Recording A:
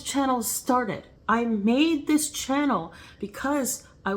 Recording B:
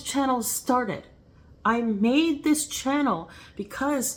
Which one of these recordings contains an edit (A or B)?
A